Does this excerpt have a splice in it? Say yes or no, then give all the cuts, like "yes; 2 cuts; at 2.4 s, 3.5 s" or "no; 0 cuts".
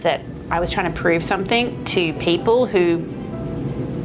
no; 0 cuts